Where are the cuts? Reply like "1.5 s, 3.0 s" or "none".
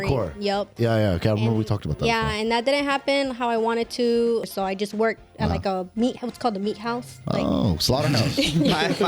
4.5 s